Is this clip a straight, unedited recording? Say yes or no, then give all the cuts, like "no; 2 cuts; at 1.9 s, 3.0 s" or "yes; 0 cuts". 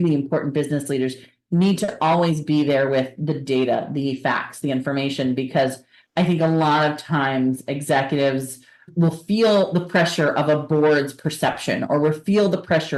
yes; 0 cuts